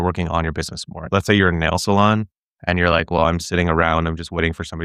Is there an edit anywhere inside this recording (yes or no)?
yes